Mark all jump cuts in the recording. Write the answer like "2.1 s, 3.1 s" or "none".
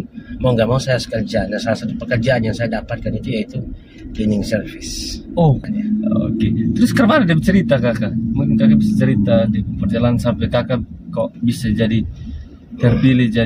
5.6 s

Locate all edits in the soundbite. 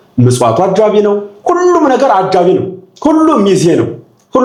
none

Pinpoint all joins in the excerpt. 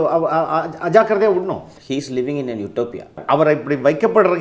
1.7 s, 3.2 s

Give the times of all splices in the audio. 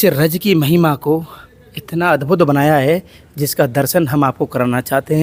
none

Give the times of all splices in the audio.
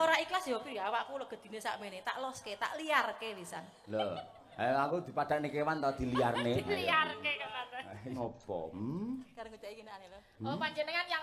8.1 s

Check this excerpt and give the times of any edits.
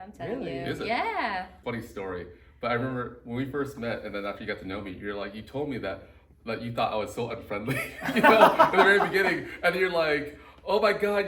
1.6 s

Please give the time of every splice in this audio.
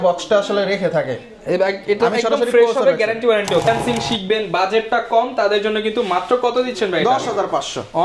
3.7 s

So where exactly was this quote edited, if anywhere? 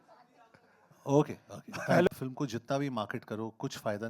2.1 s

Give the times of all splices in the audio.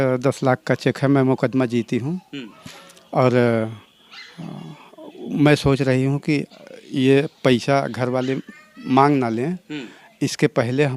none

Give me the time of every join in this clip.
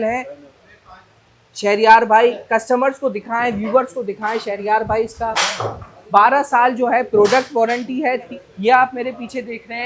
8.4 s

